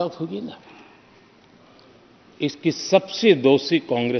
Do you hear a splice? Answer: no; 0 cuts

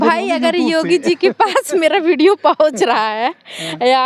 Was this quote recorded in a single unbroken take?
yes; 0 cuts

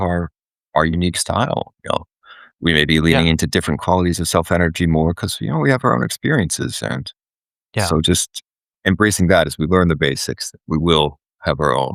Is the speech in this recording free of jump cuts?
yes; 0 cuts

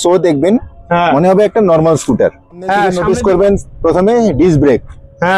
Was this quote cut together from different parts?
yes; 1 cut; at 2.9 s

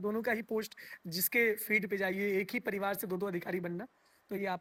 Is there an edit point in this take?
no; 0 cuts

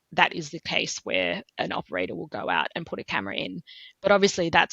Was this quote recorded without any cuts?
yes; 0 cuts

